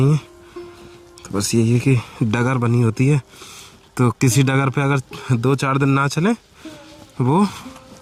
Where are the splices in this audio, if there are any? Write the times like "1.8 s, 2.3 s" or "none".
none